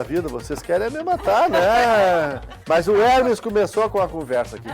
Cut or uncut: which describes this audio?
cut